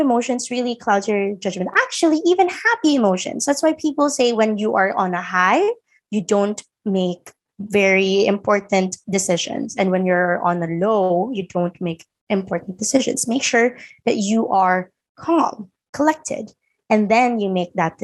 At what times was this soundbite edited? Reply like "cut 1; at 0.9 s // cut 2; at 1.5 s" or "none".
none